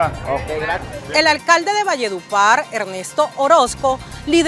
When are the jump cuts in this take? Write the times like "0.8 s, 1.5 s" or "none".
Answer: none